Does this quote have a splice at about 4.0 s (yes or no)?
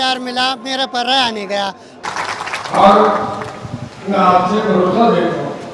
no